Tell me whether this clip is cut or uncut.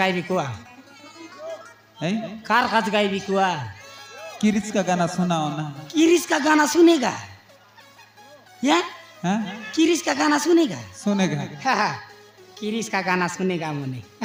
uncut